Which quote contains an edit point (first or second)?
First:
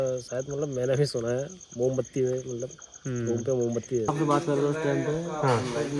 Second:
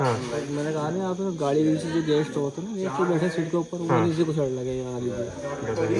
first